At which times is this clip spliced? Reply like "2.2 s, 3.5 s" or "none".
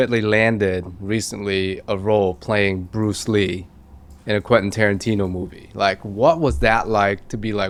none